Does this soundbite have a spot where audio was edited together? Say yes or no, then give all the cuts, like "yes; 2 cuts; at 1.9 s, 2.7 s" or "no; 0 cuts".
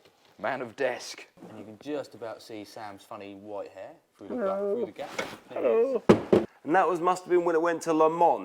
yes; 2 cuts; at 1.5 s, 6.5 s